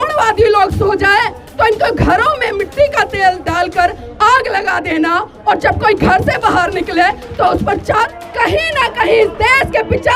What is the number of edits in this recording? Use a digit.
1